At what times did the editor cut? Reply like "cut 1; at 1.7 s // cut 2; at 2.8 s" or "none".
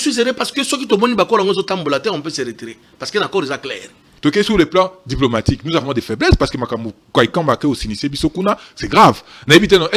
cut 1; at 4.1 s

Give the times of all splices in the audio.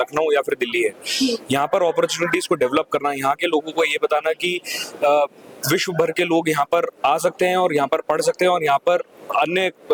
none

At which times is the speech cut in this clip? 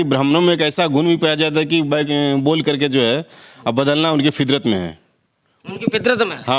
none

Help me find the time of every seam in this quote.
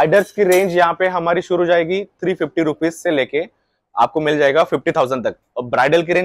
none

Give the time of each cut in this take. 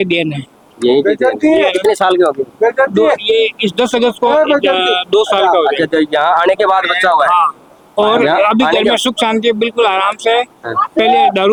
none

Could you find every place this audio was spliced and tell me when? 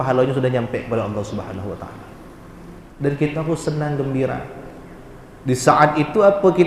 cut 1; at 2.8 s

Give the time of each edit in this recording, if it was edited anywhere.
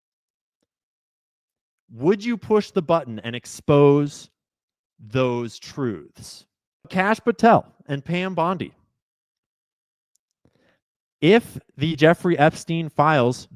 cut 1; at 6.9 s

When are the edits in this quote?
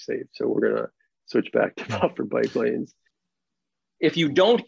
cut 1; at 3.3 s

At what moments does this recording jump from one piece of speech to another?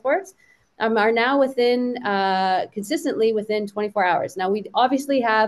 none

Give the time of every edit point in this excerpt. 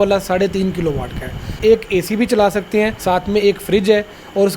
cut 1; at 1.5 s // cut 2; at 3.0 s

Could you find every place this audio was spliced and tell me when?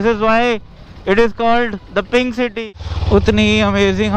cut 1; at 2.6 s

